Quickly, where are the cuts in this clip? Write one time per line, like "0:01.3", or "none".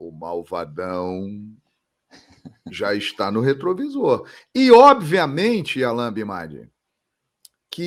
none